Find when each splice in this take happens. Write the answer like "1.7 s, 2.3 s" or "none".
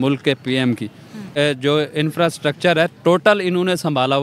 1.3 s